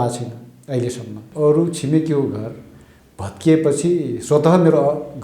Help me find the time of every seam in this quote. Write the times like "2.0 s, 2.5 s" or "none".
1.2 s